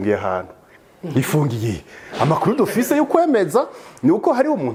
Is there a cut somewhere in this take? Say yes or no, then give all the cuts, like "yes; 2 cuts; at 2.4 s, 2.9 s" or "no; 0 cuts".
no; 0 cuts